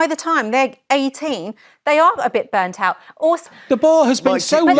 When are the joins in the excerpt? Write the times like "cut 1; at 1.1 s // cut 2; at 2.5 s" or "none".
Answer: cut 1; at 3.4 s